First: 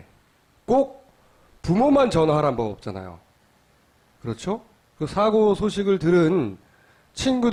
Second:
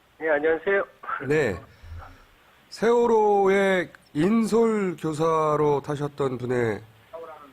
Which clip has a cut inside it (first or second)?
second